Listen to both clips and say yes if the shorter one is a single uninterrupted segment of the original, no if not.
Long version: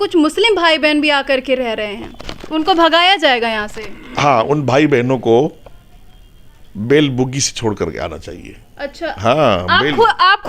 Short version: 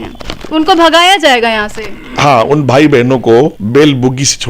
no